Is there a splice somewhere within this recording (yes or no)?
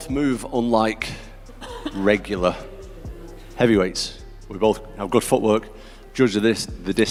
no